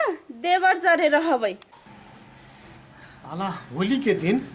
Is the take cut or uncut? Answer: cut